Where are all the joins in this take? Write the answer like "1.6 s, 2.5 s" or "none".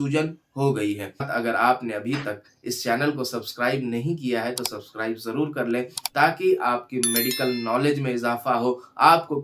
1.3 s